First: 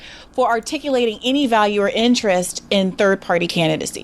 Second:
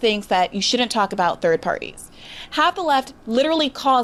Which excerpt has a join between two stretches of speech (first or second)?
first